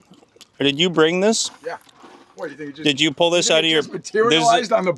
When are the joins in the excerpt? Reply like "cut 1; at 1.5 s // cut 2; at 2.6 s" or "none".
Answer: none